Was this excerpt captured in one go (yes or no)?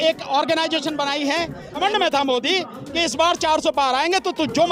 no